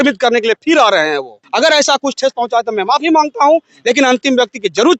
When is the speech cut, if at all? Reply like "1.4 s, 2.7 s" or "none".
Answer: 1.4 s